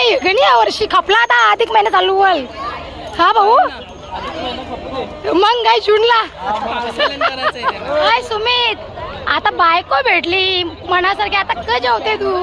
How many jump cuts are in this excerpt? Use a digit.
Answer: 1